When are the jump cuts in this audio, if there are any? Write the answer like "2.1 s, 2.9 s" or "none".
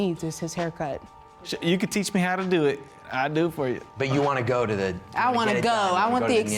1.5 s, 3.9 s